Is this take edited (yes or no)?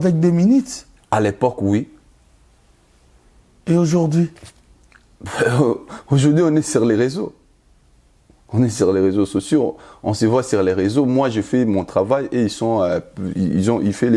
no